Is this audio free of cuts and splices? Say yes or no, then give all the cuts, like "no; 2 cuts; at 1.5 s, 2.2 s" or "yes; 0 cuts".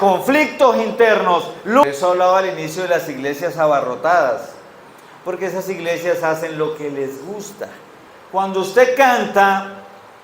no; 2 cuts; at 1.8 s, 7.9 s